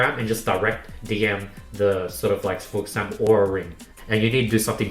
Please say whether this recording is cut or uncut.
cut